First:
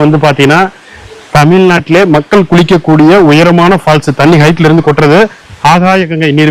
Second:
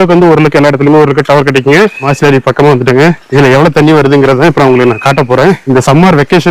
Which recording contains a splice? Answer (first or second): second